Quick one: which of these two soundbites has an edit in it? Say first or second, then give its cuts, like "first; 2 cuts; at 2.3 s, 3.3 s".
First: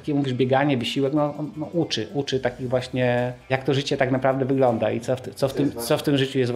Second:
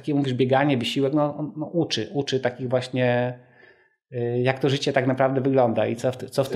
first; 1 cut; at 3.5 s